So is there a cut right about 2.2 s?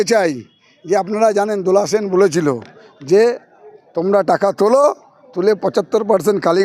no; 0 cuts

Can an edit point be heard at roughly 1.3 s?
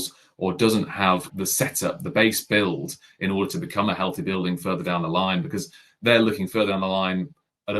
yes; 1 cut; at 1.3 s

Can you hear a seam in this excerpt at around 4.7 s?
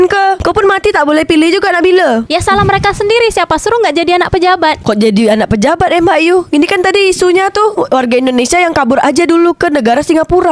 no; 0 cuts

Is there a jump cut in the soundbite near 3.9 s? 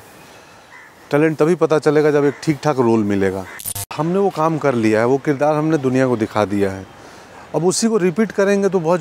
yes; 1 cut; at 3.9 s

